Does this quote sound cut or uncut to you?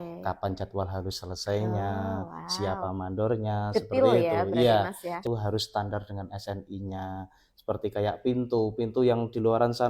cut